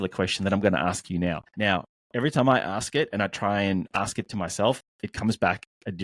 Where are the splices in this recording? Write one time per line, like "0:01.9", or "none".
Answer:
0:01.5